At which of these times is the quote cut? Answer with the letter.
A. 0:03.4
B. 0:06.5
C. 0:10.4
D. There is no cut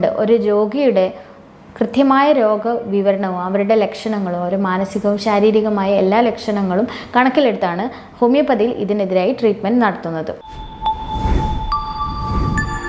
C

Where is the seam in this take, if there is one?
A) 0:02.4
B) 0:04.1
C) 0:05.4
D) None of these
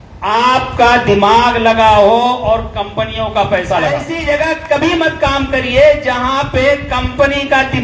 B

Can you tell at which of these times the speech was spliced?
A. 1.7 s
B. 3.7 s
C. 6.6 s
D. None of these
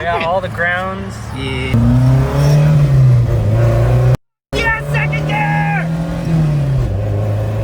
A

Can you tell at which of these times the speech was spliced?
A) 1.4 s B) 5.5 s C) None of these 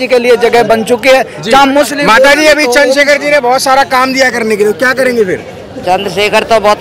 C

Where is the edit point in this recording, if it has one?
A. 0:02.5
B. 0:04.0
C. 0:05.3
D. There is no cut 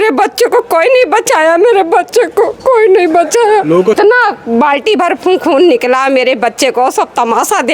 B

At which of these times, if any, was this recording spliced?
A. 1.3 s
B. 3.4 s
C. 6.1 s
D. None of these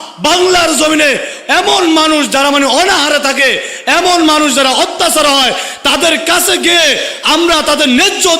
A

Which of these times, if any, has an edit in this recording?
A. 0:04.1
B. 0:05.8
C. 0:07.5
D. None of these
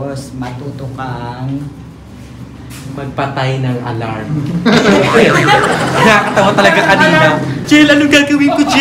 C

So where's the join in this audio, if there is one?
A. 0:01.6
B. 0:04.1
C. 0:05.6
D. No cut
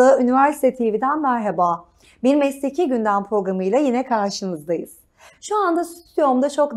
D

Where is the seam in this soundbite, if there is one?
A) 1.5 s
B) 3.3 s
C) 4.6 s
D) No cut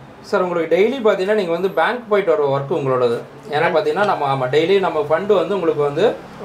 D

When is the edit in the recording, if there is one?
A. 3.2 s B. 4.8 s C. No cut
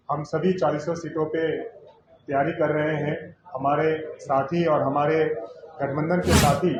C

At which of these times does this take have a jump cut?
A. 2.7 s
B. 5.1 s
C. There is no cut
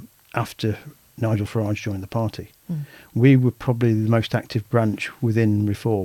C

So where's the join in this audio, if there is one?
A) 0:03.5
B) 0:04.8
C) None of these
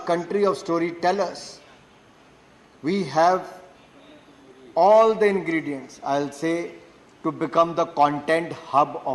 C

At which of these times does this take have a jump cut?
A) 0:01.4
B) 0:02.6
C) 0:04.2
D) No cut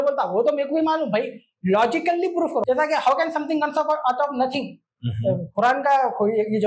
B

